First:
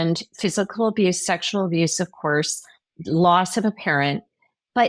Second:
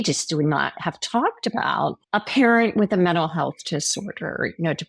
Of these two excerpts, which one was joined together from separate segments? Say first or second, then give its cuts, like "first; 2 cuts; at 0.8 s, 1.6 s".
second; 1 cut; at 2.0 s